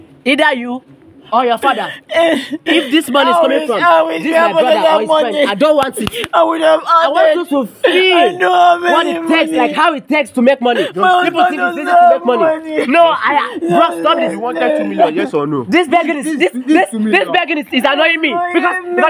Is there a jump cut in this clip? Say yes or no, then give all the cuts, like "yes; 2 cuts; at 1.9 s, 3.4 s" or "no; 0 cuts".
no; 0 cuts